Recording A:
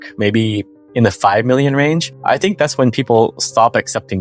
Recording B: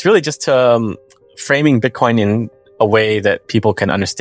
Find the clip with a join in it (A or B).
A